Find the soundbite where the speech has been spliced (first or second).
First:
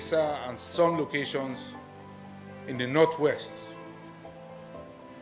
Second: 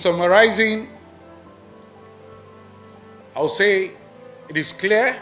first